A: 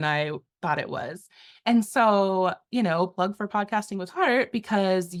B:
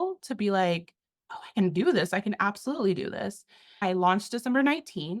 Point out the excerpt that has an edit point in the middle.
B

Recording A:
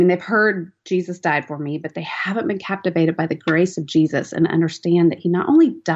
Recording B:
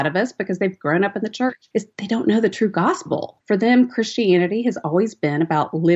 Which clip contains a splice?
B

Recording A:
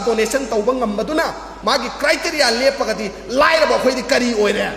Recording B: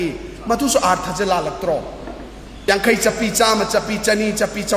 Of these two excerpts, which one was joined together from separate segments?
B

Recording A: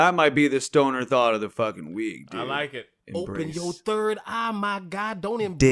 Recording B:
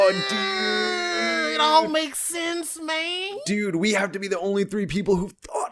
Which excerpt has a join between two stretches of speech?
A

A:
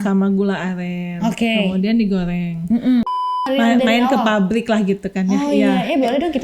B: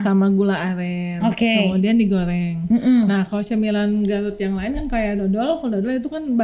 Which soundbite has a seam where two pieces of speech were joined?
A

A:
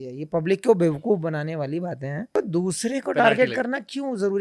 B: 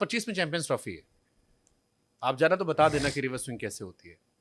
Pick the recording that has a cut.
A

